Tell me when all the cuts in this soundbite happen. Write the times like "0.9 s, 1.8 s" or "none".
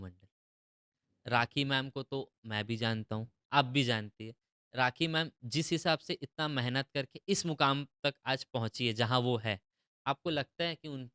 none